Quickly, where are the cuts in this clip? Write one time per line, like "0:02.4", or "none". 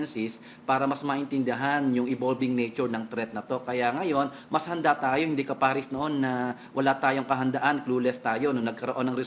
none